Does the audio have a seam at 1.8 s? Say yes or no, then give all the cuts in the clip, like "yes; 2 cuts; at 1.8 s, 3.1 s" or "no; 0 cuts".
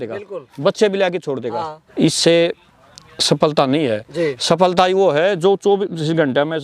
yes; 1 cut; at 1.8 s